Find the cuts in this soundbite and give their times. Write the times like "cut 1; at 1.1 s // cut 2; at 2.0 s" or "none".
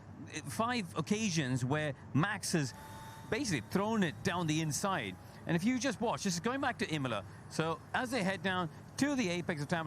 cut 1; at 2.3 s // cut 2; at 7.8 s